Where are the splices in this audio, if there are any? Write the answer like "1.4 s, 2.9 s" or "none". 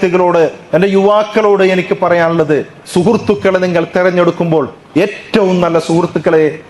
none